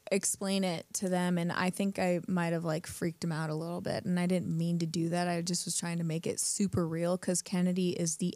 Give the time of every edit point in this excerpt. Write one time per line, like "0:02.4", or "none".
none